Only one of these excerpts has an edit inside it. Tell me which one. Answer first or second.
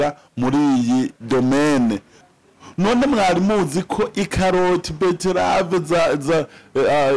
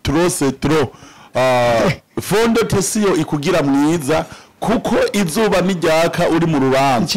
first